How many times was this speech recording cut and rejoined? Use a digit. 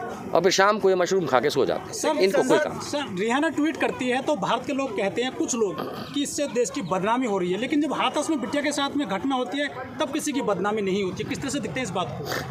0